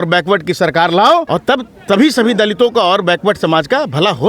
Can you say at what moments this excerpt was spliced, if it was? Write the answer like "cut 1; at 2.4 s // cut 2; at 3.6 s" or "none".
cut 1; at 1.3 s